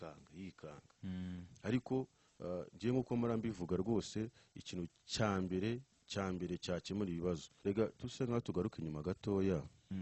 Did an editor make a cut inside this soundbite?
yes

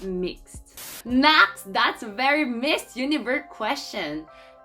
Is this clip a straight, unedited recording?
no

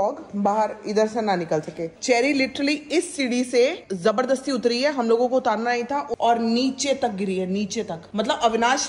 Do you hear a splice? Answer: yes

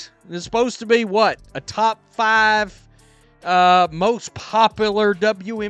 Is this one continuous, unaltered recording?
yes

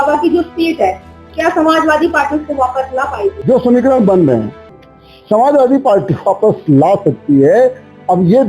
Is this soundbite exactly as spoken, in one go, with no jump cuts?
no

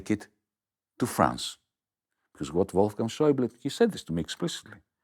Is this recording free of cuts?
yes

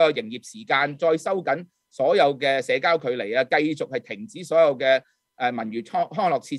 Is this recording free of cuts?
yes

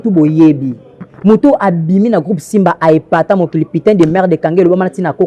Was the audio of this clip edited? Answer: no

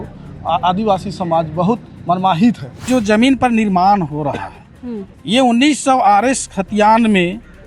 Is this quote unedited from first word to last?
no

